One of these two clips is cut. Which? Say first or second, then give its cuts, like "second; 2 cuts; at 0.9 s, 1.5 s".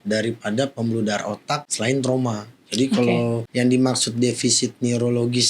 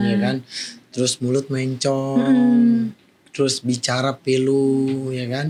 first; 2 cuts; at 1.7 s, 3.4 s